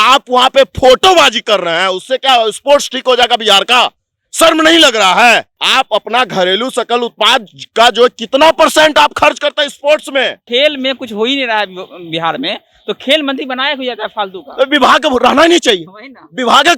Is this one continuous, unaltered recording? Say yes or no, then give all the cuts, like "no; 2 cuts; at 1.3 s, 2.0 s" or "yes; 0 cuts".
no; 2 cuts; at 5.6 s, 10.4 s